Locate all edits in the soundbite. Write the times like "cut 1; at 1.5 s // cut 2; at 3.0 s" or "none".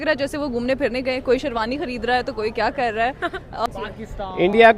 cut 1; at 3.7 s